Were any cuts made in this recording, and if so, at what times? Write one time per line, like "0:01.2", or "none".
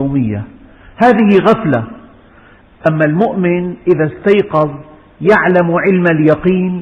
none